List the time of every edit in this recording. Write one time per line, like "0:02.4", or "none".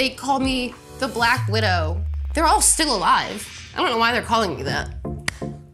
0:02.1